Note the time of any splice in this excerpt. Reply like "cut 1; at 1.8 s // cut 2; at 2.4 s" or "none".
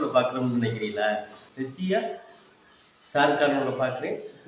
cut 1; at 1.4 s